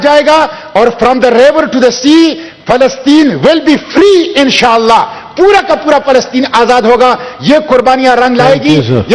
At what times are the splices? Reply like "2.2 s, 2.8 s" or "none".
none